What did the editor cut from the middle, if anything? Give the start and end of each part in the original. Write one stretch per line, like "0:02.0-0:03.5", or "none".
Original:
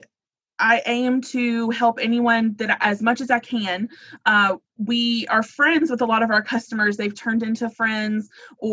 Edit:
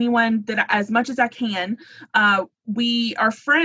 none